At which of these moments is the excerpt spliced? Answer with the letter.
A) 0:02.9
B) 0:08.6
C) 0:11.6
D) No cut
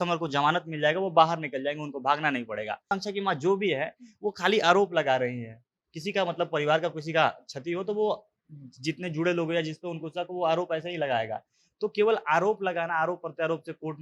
A